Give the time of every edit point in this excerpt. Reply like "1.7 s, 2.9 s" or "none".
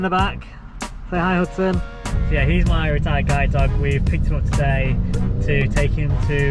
2.2 s